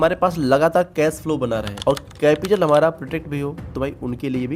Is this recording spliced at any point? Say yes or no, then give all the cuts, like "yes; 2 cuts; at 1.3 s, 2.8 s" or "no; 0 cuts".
no; 0 cuts